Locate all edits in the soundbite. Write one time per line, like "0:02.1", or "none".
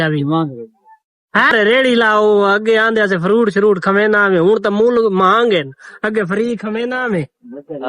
0:01.5